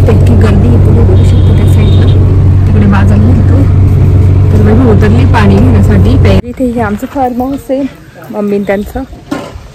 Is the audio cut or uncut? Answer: cut